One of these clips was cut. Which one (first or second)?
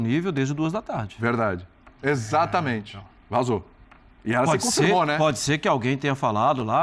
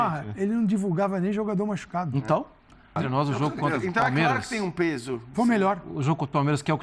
second